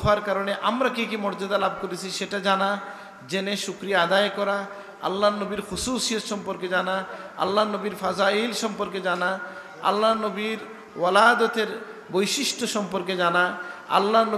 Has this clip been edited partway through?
no; 0 cuts

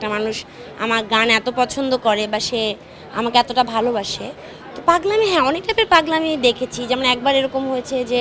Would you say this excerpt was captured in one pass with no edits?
yes; 0 cuts

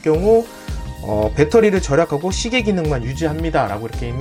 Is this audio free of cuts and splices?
yes; 0 cuts

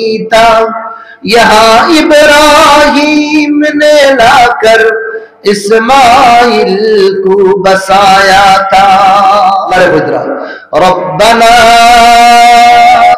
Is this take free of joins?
no; 1 cut; at 9.7 s

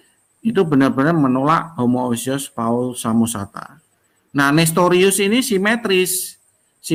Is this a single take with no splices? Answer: yes; 0 cuts

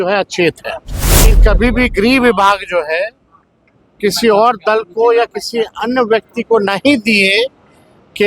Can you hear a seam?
yes; 1 cut; at 1.3 s

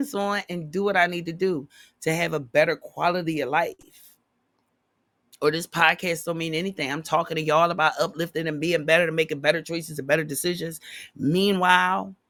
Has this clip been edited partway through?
no; 0 cuts

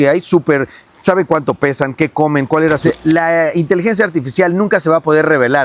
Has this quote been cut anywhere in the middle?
yes; 1 cut; at 2.8 s

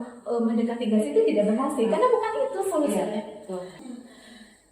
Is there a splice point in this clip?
yes; 1 cut; at 3.8 s

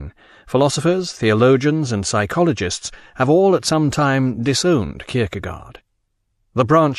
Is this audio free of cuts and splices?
yes; 0 cuts

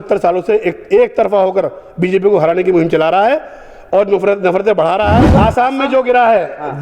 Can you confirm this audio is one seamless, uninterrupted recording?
no; 1 cut; at 5.3 s

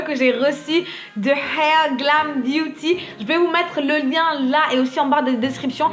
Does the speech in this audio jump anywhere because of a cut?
no; 0 cuts

